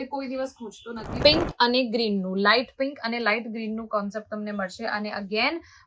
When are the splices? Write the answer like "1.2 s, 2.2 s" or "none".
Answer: 1.0 s